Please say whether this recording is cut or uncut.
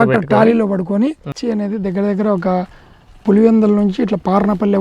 cut